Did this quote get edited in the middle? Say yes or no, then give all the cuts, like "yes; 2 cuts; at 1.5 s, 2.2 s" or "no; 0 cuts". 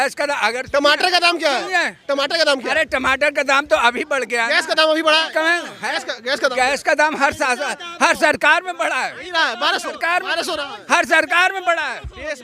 no; 0 cuts